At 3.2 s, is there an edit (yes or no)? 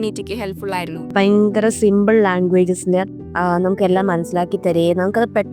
yes